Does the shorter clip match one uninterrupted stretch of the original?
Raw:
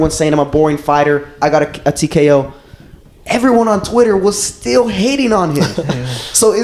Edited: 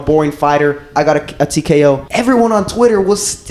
no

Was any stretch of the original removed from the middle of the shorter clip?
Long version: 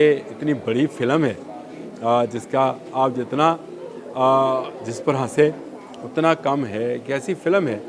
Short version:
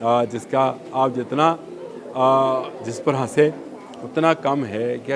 no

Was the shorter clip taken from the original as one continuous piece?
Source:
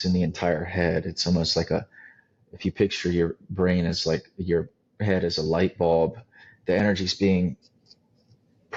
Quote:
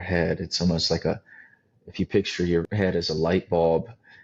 no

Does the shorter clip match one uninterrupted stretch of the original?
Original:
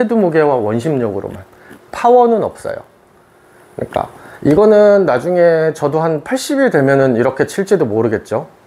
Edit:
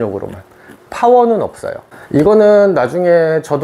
no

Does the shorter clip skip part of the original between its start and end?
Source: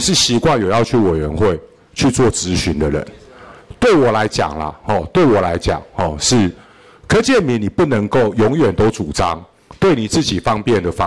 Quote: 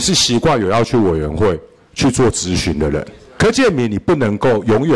yes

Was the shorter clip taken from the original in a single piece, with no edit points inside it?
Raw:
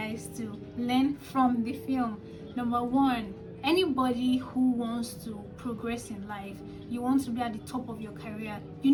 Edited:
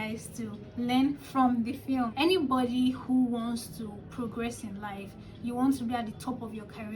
no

